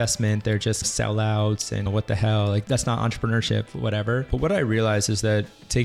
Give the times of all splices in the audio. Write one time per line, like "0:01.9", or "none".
0:02.6